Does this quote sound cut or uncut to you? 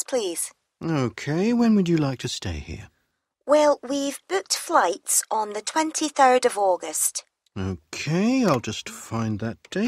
uncut